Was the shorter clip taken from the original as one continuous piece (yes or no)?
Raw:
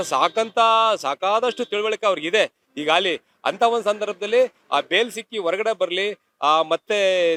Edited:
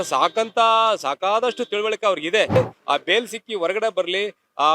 no